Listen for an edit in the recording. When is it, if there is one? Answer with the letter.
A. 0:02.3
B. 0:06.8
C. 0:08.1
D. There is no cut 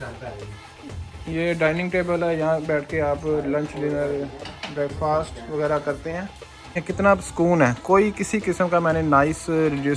B